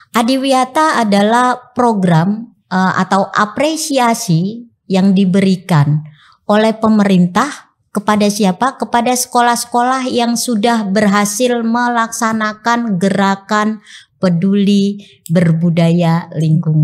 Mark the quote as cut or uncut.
uncut